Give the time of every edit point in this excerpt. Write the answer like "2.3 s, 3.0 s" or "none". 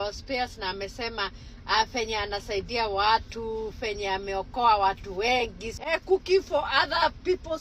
5.6 s